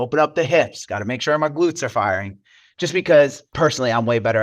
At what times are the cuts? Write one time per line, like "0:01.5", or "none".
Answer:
0:03.5